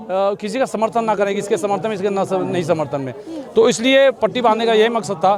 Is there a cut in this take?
no; 0 cuts

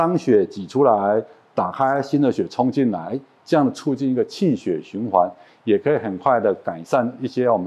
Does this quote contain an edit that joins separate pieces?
no; 0 cuts

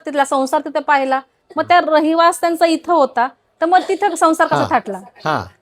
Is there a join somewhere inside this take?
no; 0 cuts

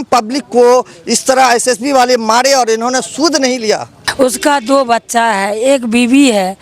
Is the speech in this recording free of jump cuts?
no; 1 cut; at 4.0 s

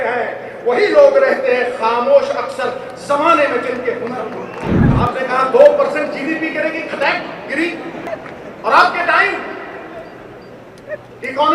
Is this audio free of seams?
no; 2 cuts; at 4.7 s, 8.0 s

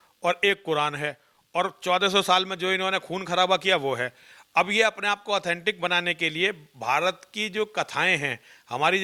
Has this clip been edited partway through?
no; 0 cuts

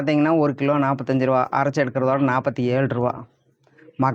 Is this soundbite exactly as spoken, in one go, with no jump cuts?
yes; 0 cuts

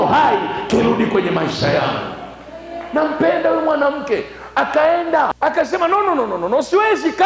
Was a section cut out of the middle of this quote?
yes; 1 cut; at 5.3 s

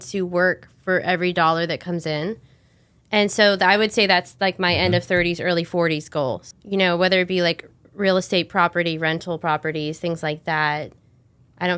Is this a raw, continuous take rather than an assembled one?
no; 1 cut; at 6.4 s

